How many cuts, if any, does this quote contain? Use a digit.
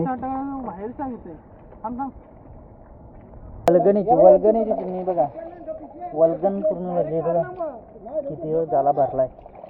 1